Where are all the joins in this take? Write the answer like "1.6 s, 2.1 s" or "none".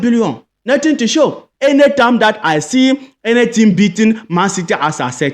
1.4 s